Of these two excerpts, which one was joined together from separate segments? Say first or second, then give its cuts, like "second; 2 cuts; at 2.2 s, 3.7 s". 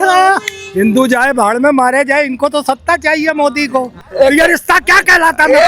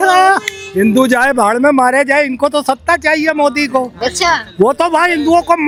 first; 1 cut; at 4.0 s